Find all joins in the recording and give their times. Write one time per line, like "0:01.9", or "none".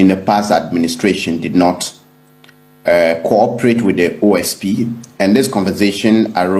none